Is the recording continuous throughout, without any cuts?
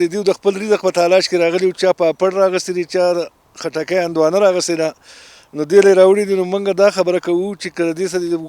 yes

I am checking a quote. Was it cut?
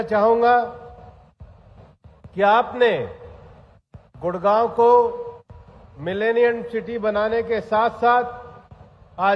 no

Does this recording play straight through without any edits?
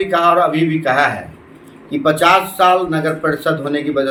yes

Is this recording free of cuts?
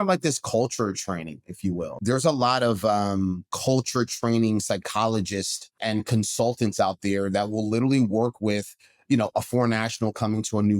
no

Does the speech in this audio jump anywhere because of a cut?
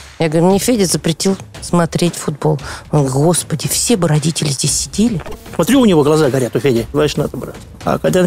yes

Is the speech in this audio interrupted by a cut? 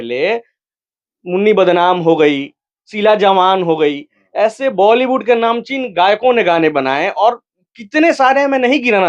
no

